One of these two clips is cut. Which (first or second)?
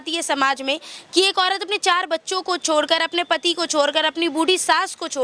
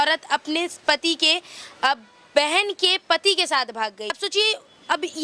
second